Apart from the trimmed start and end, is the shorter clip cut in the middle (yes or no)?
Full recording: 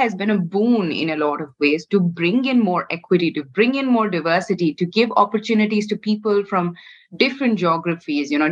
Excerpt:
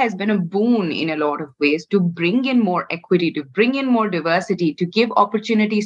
no